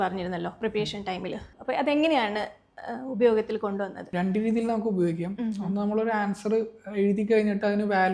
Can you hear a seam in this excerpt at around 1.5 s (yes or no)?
yes